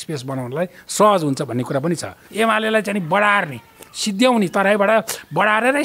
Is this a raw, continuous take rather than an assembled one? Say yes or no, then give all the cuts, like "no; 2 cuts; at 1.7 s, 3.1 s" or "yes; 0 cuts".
no; 1 cut; at 2.2 s